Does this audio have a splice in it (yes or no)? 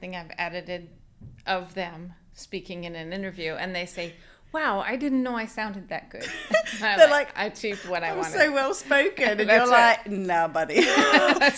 no